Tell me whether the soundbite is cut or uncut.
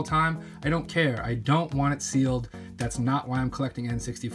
uncut